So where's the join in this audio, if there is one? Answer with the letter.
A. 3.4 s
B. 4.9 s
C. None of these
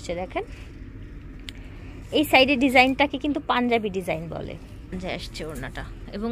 B